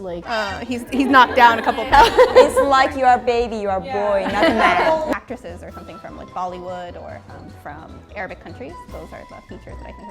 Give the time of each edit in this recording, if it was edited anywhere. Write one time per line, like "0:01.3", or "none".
0:05.2